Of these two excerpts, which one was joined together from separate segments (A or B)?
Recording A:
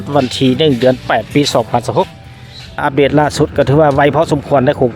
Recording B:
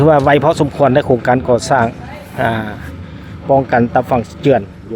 A